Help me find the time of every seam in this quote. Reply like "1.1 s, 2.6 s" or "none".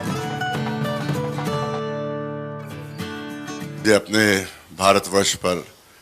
3.8 s